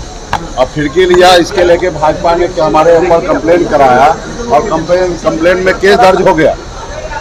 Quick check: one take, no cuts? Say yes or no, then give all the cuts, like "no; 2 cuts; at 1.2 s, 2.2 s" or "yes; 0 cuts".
yes; 0 cuts